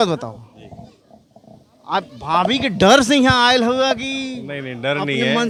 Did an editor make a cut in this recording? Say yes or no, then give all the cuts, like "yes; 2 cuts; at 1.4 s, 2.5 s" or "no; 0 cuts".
no; 0 cuts